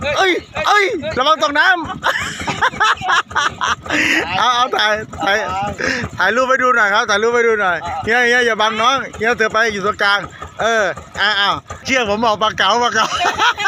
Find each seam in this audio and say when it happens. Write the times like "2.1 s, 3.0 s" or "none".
11.9 s